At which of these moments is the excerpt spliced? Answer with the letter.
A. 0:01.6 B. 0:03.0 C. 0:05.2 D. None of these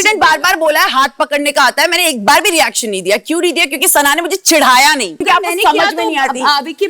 C